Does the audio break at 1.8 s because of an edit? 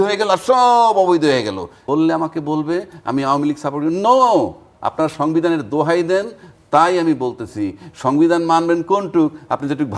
yes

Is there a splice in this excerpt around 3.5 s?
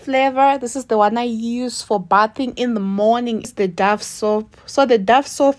yes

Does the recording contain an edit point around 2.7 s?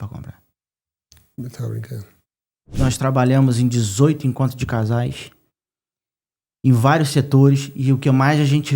yes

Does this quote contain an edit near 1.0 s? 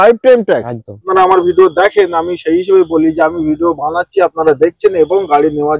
yes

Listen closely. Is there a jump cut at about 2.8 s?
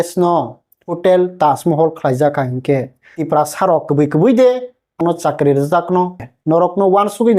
no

